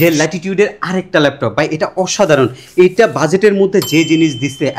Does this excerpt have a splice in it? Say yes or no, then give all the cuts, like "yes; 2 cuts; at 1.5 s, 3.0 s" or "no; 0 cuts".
no; 0 cuts